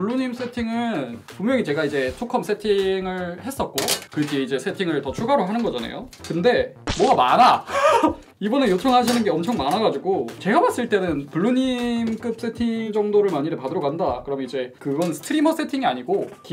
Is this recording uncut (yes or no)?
yes